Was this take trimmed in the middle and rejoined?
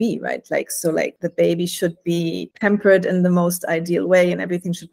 yes; 2 cuts; at 1.2 s, 2.5 s

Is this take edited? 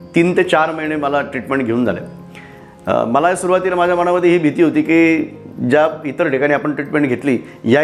no; 0 cuts

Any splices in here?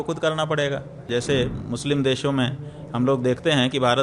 yes; 1 cut; at 1.0 s

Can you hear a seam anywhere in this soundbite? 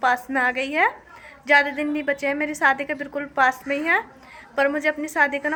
no; 0 cuts

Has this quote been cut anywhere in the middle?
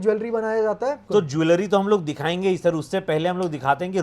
yes; 1 cut; at 1.0 s

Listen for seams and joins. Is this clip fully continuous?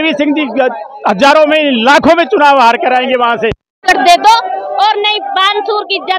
no; 1 cut; at 3.7 s

